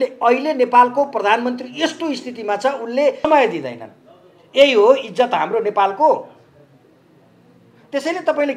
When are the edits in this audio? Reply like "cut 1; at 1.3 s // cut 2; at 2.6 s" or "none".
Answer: cut 1; at 3.2 s